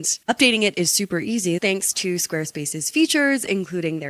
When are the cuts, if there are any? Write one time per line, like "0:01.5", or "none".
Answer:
0:01.6